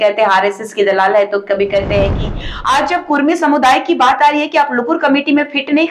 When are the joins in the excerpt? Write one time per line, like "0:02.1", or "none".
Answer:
0:02.5